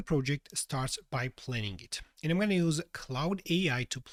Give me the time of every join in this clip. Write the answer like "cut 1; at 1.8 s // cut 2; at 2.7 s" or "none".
none